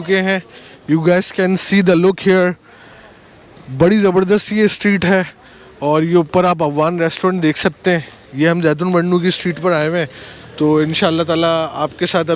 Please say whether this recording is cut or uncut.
uncut